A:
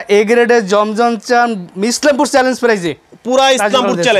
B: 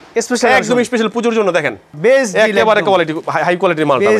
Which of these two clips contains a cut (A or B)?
B